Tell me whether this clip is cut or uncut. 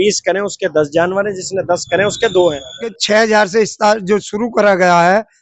cut